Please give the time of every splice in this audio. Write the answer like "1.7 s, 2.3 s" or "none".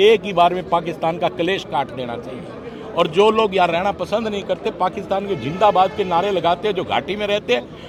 none